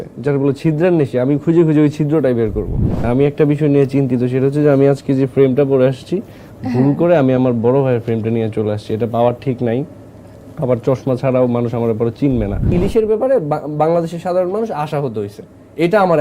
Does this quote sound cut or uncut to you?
cut